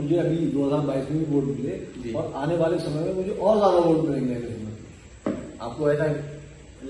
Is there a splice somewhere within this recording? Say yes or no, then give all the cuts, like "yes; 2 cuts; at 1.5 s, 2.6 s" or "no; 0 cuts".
no; 0 cuts